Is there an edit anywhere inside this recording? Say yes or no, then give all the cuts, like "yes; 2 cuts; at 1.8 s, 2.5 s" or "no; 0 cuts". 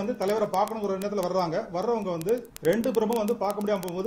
yes; 1 cut; at 2.5 s